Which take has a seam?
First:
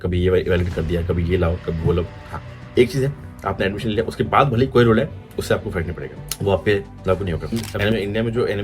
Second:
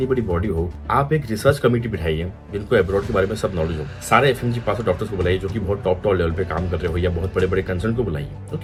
first; 2 cuts; at 2.1 s, 7.7 s

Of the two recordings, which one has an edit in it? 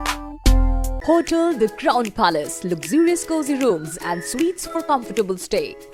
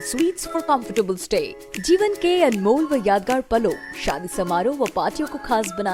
first; 1 cut; at 0.9 s

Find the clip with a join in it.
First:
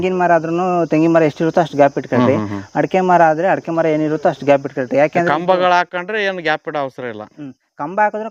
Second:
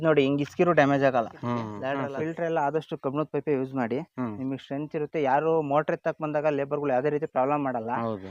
second; 1 cut; at 1.7 s

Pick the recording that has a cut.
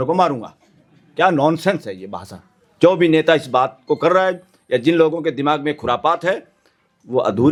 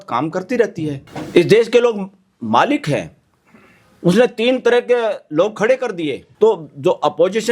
second; 2 cuts; at 1.1 s, 6.2 s

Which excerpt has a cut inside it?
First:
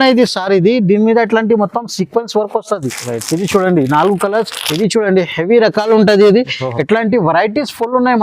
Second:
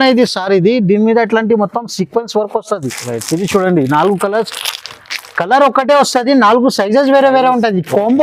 first; 1 cut; at 4.6 s

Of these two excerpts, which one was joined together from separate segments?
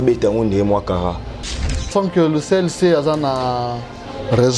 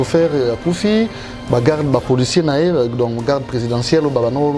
first; 1 cut; at 1.8 s

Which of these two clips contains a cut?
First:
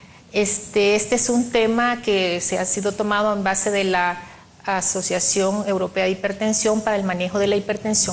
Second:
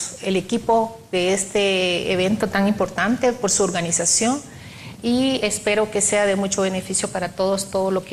first; 1 cut; at 2.3 s

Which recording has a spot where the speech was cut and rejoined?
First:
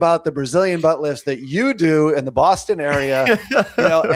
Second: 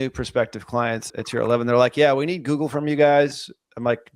second; 1 cut; at 1.1 s

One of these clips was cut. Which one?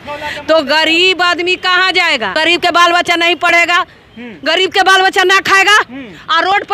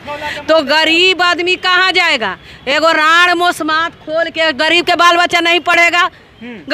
first; 1 cut; at 2.3 s

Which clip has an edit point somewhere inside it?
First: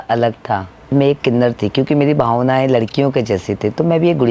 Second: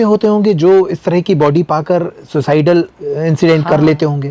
first; 1 cut; at 0.9 s

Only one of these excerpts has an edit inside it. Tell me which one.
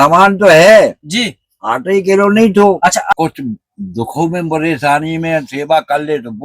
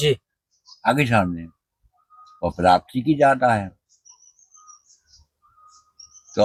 first; 1 cut; at 3.1 s

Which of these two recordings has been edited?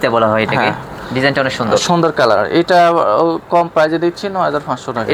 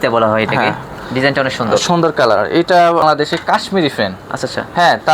second; 1 cut; at 3.0 s

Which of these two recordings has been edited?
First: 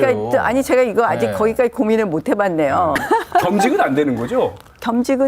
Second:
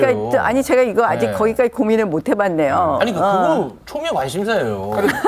first; 1 cut; at 3.0 s

